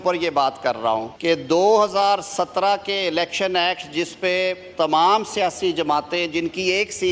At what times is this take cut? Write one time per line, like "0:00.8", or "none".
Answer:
0:01.1